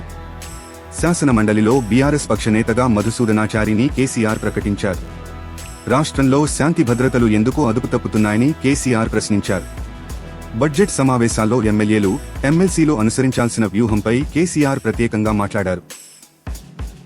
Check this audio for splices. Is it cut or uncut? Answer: cut